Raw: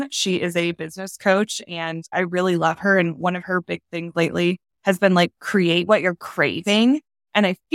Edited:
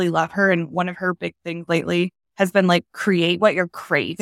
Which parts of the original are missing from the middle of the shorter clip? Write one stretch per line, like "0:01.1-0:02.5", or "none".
none